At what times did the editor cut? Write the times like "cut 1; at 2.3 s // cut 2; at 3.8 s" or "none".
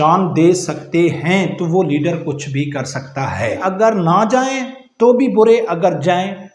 cut 1; at 3.6 s

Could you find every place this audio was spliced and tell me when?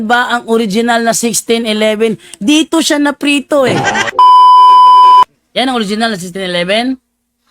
cut 1; at 4.0 s // cut 2; at 5.4 s

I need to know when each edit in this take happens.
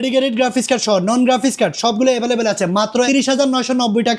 cut 1; at 3.1 s

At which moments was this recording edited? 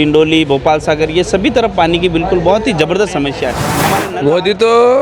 cut 1; at 3.7 s

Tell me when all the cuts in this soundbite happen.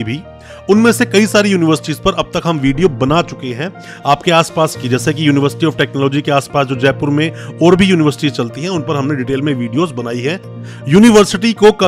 cut 1; at 10.5 s

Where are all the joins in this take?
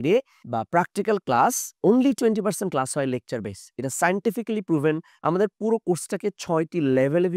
none

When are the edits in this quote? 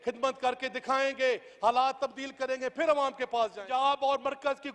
cut 1; at 3.6 s

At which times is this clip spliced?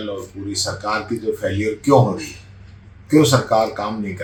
none

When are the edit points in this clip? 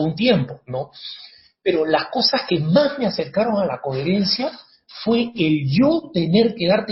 none

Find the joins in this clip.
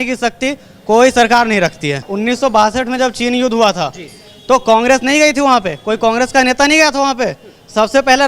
cut 1; at 2.1 s

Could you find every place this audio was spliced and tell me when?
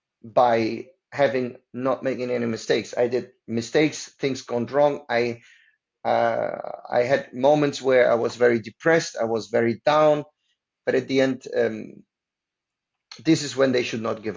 none

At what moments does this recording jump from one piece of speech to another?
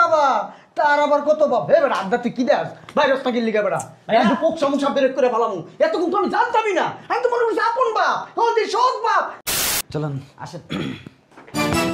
cut 1; at 9.5 s

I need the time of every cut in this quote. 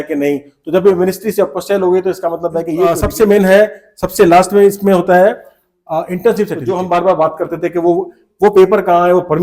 cut 1; at 2.9 s // cut 2; at 6.6 s

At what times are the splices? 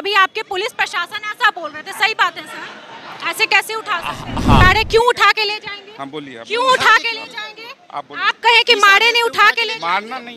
cut 1; at 4.6 s

